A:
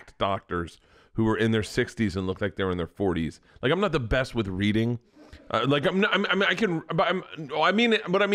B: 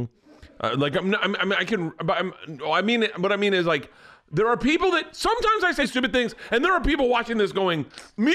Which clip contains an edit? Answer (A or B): B